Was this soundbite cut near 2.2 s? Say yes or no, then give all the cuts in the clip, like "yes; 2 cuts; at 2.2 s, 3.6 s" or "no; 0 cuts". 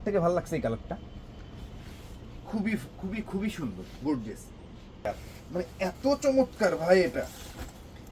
no; 1 cut; at 5.1 s